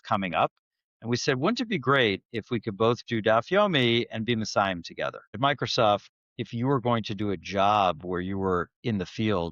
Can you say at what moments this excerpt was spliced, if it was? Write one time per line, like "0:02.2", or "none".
0:05.4

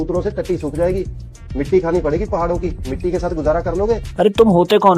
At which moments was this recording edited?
none

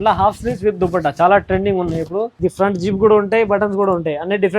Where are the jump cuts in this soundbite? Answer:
0:02.3

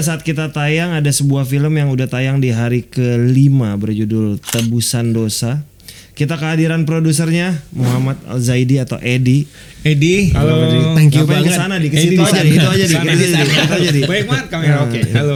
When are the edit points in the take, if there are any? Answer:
none

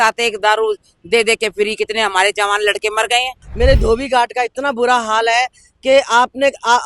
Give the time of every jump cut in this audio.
0:03.4

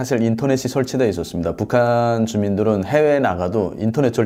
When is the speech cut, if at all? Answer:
none

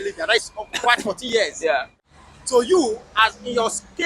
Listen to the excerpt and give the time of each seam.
0:01.9

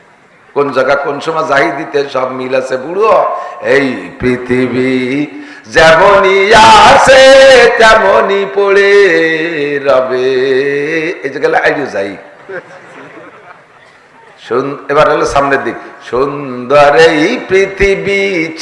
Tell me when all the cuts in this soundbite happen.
none

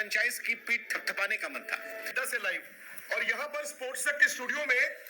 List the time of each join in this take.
0:02.1

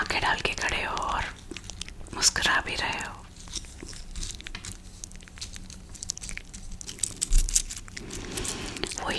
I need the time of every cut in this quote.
none

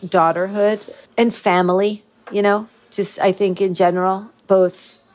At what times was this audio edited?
0:00.9

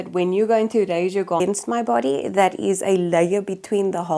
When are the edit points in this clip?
0:01.4

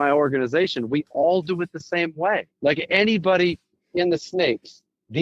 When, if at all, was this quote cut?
0:02.5

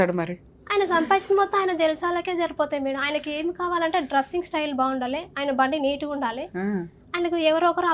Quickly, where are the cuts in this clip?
none

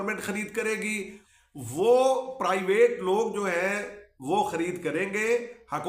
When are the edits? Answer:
0:01.2

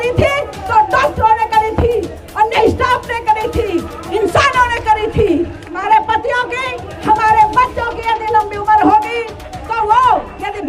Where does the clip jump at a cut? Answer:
0:05.7

